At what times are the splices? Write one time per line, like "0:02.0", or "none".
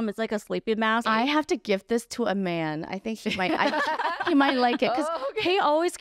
0:01.1